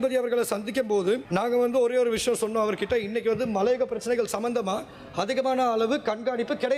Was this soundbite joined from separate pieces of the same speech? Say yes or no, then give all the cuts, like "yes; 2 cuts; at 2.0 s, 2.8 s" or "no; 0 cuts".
yes; 1 cut; at 1.2 s